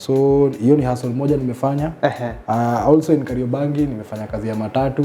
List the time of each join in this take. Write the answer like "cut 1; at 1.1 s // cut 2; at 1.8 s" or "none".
none